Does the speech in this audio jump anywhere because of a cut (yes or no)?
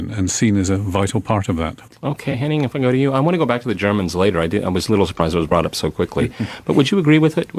yes